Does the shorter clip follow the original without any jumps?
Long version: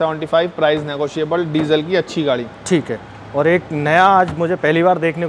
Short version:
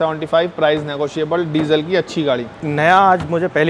no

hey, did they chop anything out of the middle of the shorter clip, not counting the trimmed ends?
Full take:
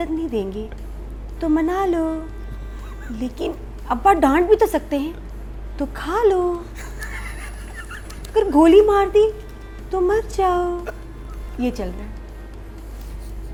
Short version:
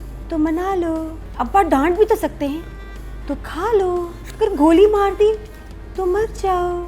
yes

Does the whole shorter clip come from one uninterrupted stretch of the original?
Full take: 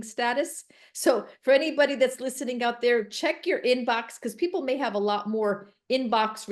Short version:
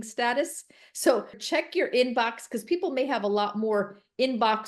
no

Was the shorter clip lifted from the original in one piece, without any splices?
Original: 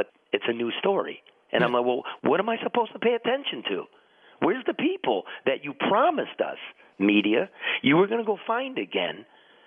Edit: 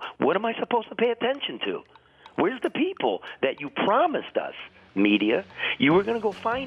yes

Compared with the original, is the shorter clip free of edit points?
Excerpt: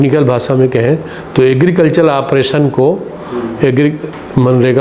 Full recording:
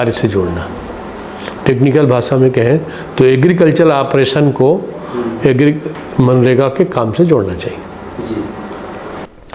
yes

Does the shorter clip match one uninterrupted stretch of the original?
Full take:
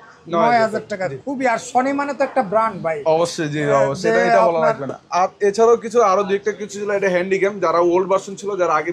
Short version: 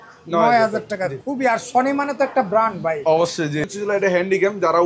no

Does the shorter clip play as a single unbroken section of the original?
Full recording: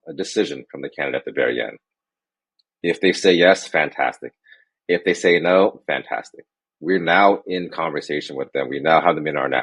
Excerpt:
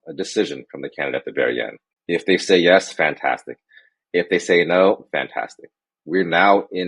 no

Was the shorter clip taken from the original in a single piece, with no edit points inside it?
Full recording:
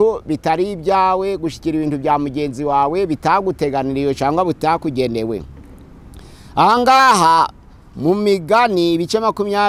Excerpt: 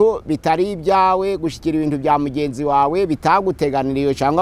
yes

